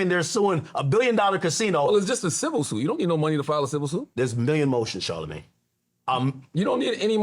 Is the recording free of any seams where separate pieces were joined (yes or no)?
no